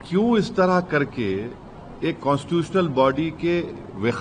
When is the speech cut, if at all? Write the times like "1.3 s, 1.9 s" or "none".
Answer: none